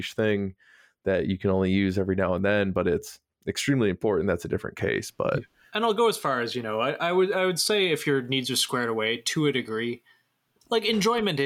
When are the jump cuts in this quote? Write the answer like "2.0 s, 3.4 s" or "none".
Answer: 5.6 s